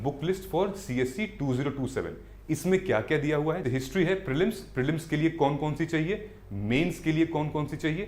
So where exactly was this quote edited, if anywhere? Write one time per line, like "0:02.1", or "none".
0:03.6